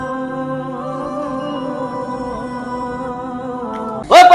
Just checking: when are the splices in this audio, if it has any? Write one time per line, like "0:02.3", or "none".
none